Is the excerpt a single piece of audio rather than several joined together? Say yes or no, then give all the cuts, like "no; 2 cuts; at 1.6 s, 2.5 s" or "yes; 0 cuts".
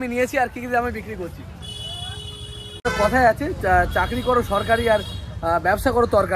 no; 1 cut; at 2.9 s